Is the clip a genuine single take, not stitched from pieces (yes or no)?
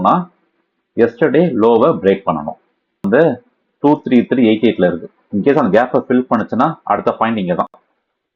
no